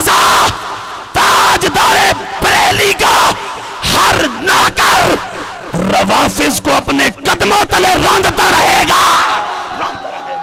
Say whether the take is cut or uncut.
uncut